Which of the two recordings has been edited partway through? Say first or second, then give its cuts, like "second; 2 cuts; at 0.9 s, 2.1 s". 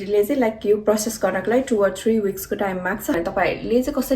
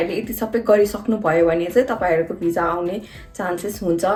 first; 1 cut; at 3.2 s